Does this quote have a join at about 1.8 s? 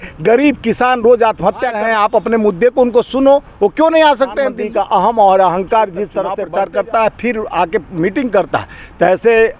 yes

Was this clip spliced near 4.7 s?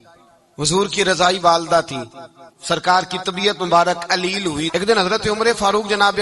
yes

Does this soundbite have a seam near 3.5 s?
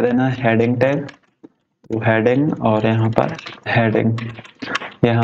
yes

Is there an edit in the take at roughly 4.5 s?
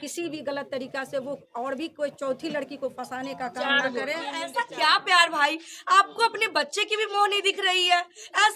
yes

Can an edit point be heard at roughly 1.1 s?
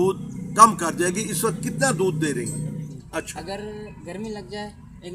no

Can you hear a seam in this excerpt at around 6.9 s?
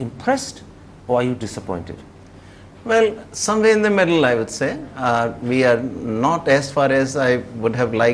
yes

